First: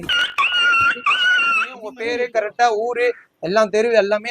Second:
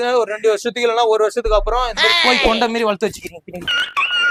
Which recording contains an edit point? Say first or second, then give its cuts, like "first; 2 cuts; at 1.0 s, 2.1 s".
first; 1 cut; at 1.9 s